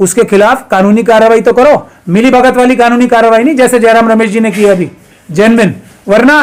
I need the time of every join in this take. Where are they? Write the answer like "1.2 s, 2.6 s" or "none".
none